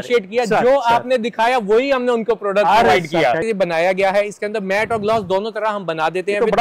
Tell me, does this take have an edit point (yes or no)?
yes